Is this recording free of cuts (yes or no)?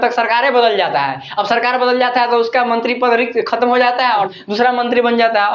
yes